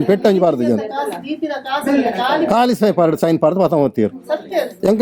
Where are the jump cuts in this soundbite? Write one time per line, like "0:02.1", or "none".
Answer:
none